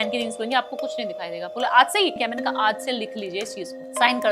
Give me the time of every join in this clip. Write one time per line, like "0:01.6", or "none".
0:02.2